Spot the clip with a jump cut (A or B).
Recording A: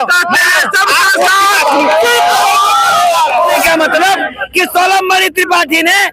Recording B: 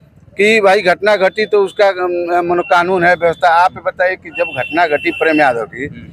A